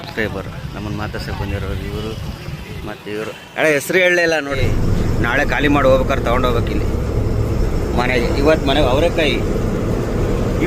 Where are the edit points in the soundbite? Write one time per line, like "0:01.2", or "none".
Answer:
0:04.6